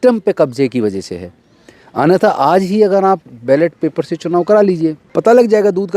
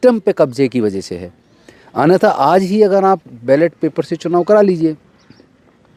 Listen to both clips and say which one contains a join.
first; 1 cut; at 5.0 s

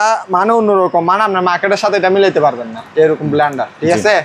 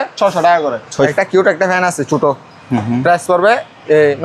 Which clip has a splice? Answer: second; 1 cut; at 1.1 s

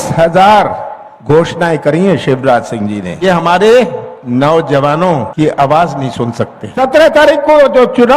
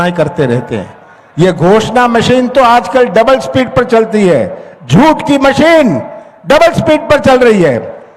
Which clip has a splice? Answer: first; 3 cuts; at 3.2 s, 5.3 s, 6.6 s

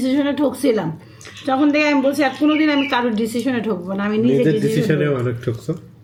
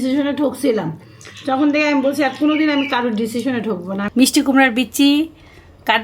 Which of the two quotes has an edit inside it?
second; 1 cut; at 4.1 s

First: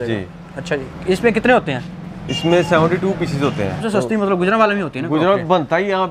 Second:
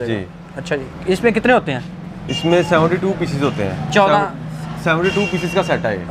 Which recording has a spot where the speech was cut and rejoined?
first; 1 cut; at 3.8 s

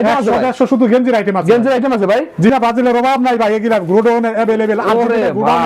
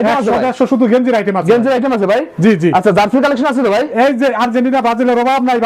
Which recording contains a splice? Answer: first; 1 cut; at 2.5 s

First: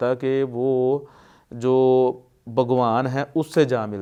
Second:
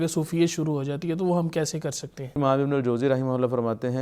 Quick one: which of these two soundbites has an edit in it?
second; 1 cut; at 2.4 s

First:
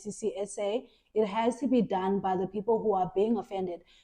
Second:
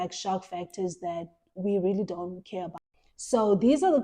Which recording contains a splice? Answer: second; 1 cut; at 2.8 s

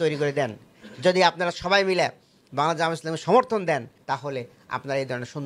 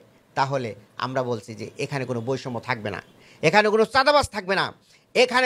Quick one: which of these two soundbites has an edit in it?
first; 1 cut; at 4.0 s

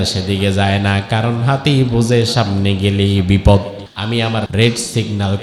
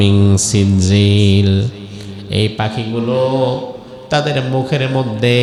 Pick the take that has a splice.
first; 1 cut; at 4.3 s

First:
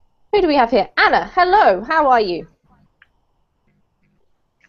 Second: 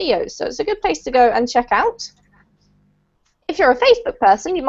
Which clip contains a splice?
second; 1 cut; at 1.9 s

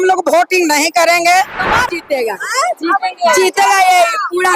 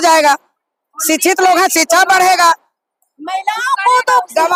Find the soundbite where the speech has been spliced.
first; 1 cut; at 1.8 s

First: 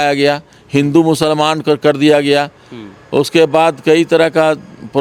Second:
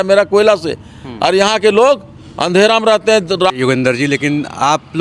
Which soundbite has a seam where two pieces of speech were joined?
second; 1 cut; at 3.5 s

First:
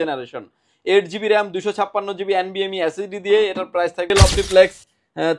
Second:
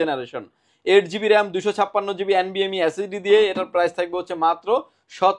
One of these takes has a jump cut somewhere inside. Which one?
first; 1 cut; at 4.1 s

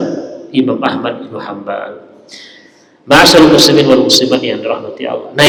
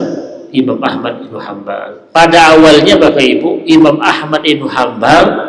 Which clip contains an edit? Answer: second; 1 cut; at 1.9 s

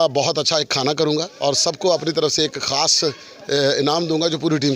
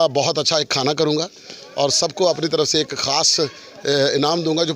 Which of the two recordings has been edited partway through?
first; 1 cut; at 1.3 s

